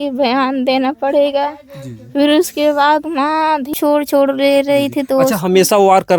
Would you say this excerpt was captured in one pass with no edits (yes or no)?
no